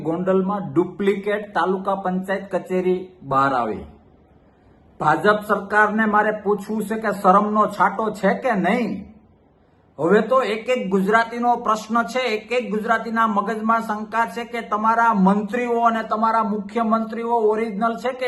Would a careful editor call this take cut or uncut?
uncut